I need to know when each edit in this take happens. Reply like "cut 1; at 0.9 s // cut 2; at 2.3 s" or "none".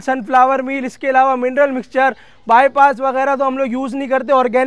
none